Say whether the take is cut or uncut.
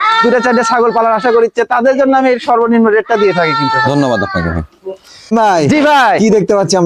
uncut